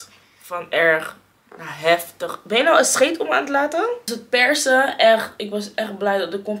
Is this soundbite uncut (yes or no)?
no